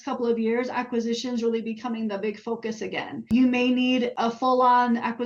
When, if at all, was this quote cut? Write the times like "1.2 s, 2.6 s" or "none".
3.3 s, 4.1 s